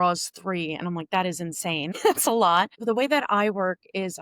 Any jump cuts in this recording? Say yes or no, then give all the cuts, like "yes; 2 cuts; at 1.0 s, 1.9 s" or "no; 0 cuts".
yes; 2 cuts; at 1.9 s, 2.8 s